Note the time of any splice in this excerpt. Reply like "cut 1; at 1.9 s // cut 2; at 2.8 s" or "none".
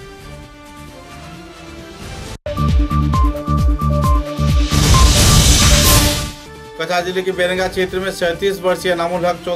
cut 1; at 6.0 s

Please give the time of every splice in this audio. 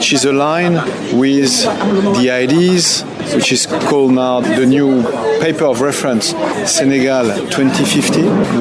none

